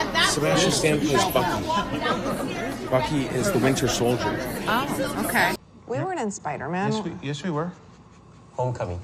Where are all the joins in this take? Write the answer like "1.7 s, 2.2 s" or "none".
5.6 s